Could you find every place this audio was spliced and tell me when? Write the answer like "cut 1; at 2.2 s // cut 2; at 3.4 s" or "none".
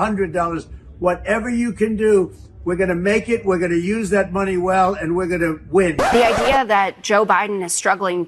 cut 1; at 6.1 s

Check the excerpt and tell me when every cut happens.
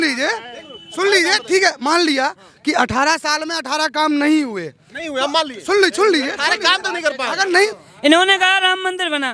cut 1; at 7.7 s

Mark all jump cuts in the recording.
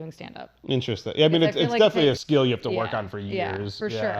cut 1; at 2.2 s

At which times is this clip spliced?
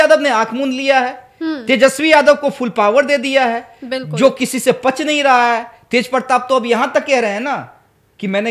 none

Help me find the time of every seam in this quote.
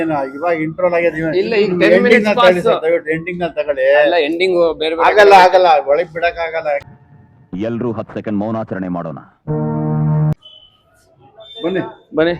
cut 1; at 10.5 s

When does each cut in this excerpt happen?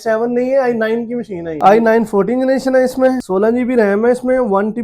cut 1; at 1.5 s // cut 2; at 3.2 s

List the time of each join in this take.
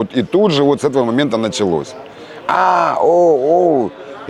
none

